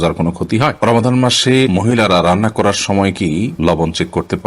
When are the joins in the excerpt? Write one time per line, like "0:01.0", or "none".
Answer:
0:00.8
0:01.7
0:03.5